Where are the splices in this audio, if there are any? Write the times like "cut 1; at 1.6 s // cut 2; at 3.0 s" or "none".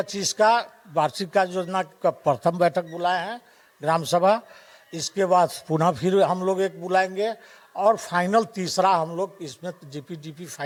none